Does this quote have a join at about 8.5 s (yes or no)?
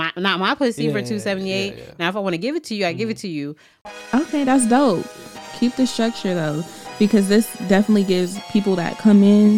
no